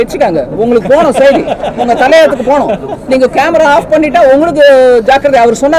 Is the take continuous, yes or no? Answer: yes